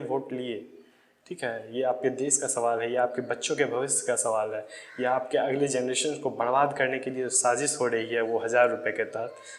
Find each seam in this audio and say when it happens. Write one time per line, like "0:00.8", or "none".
none